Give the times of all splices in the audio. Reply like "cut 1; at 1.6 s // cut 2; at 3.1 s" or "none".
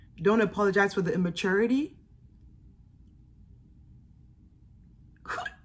none